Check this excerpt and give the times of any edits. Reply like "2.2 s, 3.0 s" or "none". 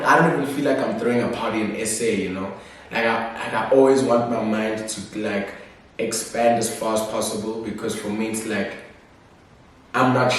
none